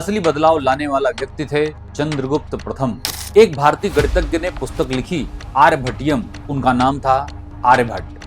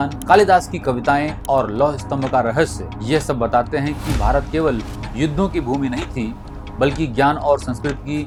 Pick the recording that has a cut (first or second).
first